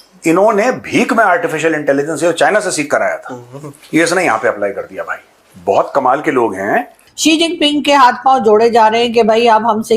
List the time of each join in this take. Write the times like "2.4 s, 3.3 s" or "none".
7.0 s